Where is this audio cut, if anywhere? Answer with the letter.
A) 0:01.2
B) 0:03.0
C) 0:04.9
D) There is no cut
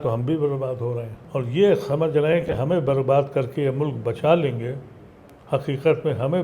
A